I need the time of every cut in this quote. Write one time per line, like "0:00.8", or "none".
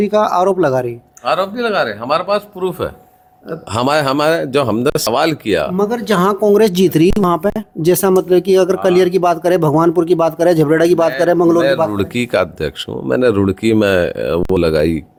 none